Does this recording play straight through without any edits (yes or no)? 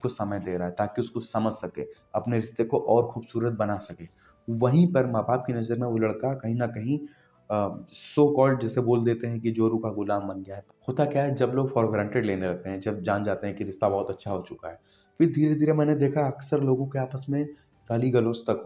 no